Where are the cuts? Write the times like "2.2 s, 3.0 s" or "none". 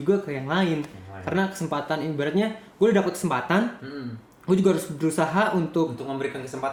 none